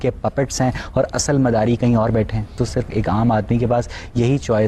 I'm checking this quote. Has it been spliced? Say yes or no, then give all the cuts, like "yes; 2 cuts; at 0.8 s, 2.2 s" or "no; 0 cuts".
yes; 1 cut; at 2.5 s